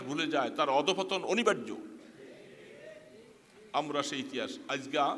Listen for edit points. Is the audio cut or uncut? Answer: uncut